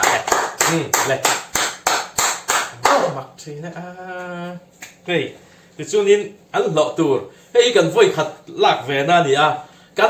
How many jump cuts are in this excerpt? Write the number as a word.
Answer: zero